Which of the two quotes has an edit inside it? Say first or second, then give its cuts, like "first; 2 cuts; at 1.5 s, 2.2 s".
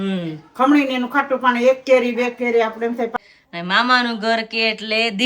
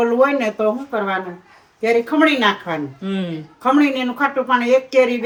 first; 1 cut; at 3.1 s